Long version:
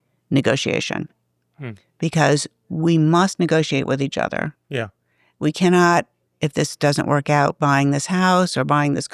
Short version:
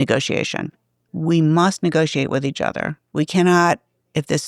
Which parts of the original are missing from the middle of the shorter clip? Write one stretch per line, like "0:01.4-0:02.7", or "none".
0:01.4-0:02.6
0:04.5-0:05.2

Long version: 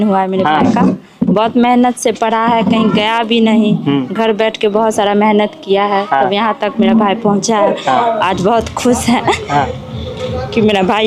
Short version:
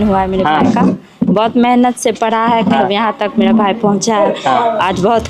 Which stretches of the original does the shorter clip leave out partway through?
0:02.8-0:06.2

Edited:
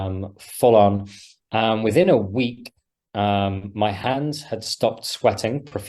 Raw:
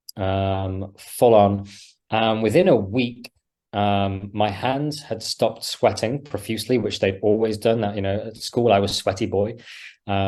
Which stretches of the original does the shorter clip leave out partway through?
none

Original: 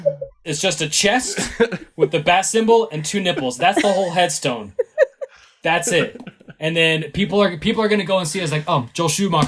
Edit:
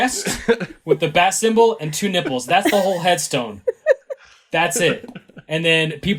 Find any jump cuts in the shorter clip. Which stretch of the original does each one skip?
none

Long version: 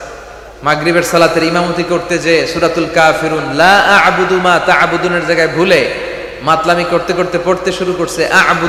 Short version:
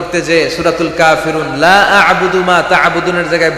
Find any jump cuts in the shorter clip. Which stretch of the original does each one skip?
none

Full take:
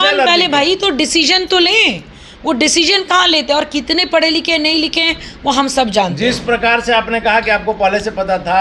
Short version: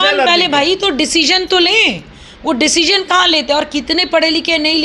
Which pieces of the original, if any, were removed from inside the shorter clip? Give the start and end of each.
none

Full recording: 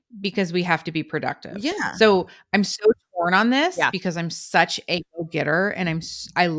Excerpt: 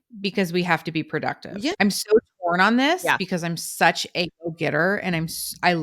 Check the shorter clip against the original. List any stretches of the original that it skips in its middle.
0:01.7-0:02.5

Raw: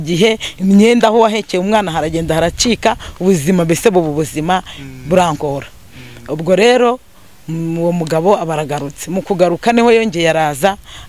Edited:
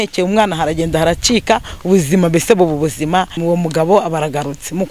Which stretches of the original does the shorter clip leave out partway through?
0:04.7-0:07.7

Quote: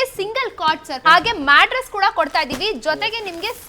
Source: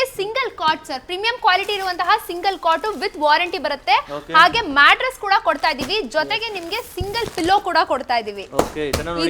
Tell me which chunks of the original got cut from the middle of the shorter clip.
0:00.9-0:04.2

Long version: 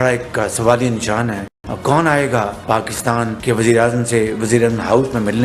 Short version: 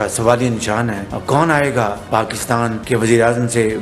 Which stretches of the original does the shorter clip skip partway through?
0:01.5-0:01.6

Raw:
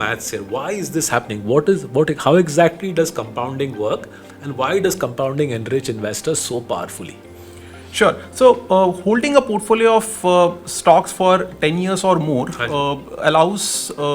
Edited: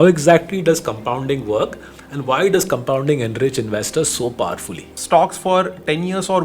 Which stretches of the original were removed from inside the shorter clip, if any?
0:07.2-0:10.7

